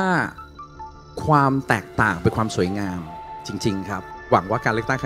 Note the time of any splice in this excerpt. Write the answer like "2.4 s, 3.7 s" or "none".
4.0 s

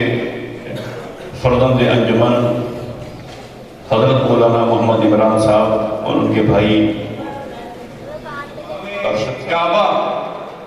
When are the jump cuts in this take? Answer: 9.3 s

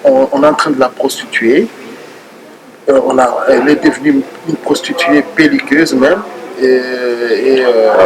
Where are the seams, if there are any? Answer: none

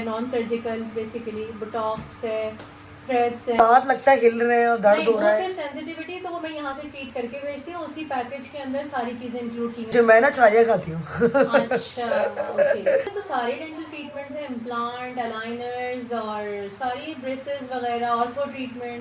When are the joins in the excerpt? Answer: 3.6 s, 9.9 s, 13.1 s

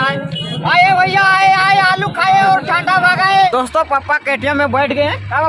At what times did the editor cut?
3.5 s

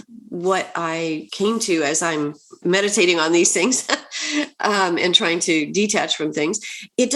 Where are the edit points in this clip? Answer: 1.3 s, 2.5 s

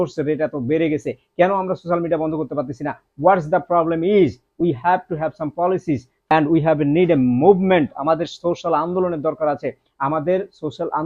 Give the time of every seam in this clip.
6.3 s

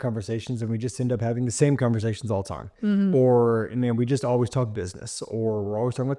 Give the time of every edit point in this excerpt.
none

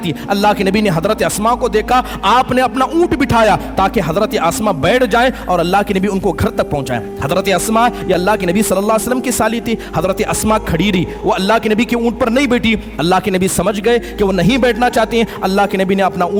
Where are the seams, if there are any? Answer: none

